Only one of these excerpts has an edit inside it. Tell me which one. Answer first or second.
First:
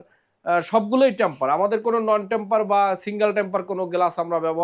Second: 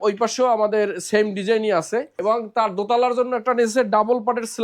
second